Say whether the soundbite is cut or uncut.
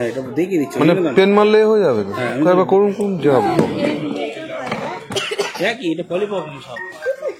uncut